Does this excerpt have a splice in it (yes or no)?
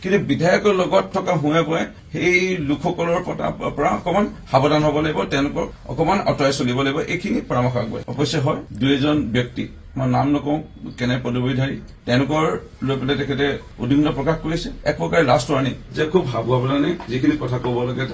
no